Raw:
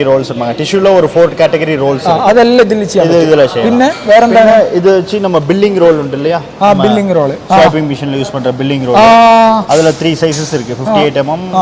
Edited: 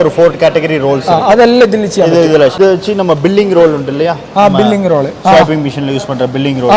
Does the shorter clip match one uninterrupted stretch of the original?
no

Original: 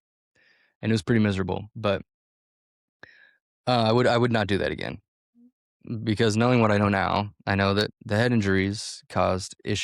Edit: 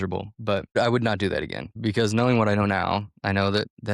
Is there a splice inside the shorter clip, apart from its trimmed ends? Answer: yes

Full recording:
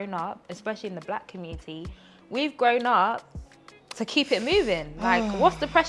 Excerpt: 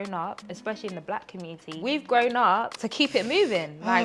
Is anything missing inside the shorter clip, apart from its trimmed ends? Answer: yes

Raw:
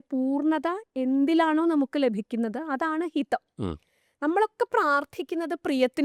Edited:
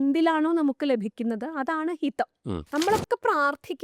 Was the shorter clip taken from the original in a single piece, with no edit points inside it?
no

